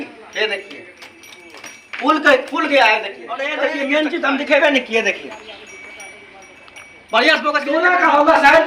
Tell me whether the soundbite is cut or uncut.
cut